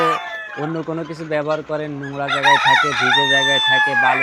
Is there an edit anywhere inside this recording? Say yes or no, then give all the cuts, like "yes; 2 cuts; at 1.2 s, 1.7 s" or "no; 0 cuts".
no; 0 cuts